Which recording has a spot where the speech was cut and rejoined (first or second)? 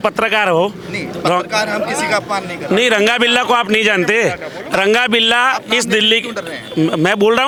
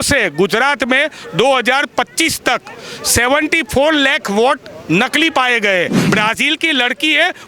second